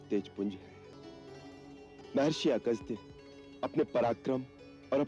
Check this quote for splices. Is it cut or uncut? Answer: cut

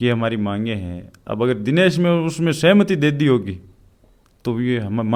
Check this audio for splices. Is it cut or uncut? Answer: uncut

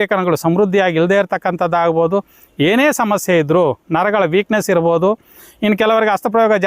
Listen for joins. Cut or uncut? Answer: uncut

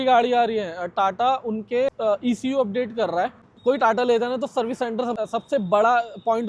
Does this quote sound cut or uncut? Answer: cut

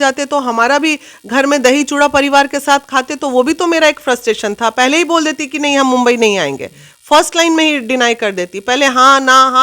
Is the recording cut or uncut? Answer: uncut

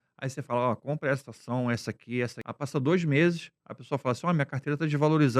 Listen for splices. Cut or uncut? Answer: cut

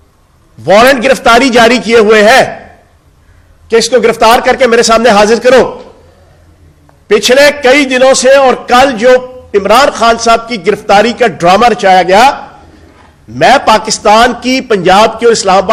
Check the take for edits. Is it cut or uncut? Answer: uncut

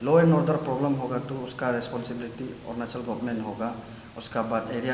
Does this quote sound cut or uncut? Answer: uncut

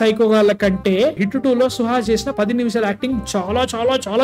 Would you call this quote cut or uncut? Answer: uncut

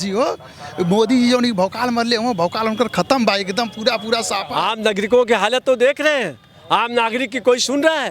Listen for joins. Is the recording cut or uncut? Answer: cut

